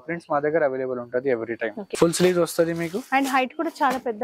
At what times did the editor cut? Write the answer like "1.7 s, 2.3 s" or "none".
1.9 s